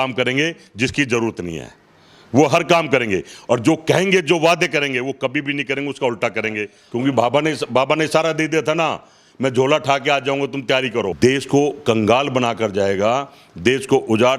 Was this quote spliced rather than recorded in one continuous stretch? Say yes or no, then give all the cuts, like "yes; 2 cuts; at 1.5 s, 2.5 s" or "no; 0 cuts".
yes; 2 cuts; at 6.8 s, 11.1 s